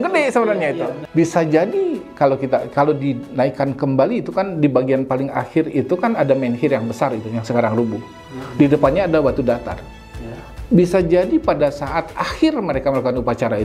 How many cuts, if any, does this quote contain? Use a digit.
0